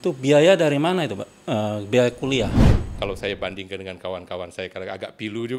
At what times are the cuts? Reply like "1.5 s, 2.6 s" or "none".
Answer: 2.9 s